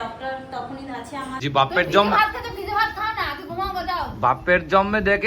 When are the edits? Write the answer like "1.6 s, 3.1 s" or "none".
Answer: 1.4 s